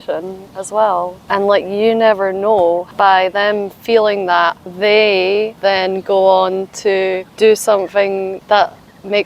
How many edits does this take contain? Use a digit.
6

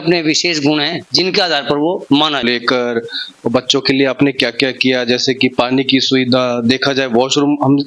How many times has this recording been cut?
1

